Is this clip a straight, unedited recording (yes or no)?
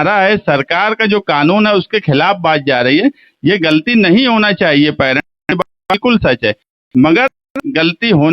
yes